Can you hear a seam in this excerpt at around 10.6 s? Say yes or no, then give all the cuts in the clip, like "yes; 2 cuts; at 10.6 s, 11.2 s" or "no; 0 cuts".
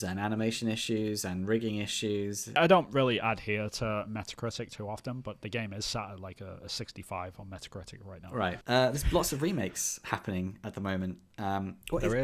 no; 2 cuts; at 2.6 s, 8.6 s